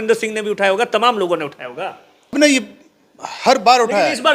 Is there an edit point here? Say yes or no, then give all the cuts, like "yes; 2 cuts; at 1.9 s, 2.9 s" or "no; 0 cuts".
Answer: yes; 1 cut; at 2.3 s